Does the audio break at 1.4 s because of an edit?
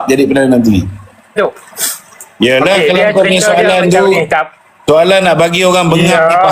yes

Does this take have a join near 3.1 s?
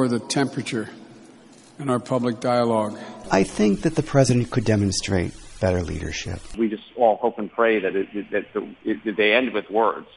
yes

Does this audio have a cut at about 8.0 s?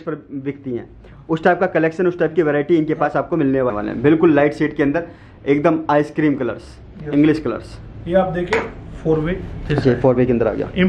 no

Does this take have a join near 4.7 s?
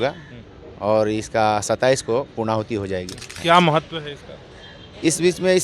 no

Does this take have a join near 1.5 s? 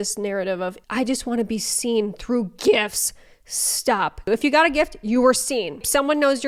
no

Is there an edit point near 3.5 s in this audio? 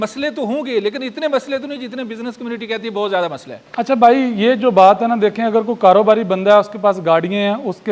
no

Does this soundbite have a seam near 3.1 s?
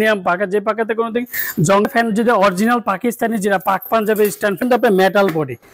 no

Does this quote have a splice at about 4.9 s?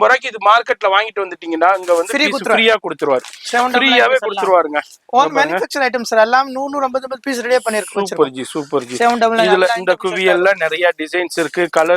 no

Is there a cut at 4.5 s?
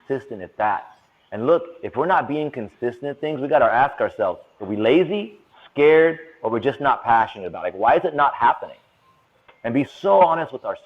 yes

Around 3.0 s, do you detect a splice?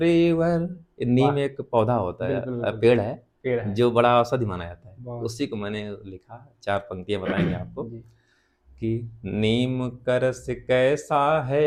no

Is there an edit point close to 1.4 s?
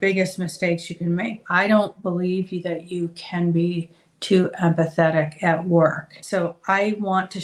yes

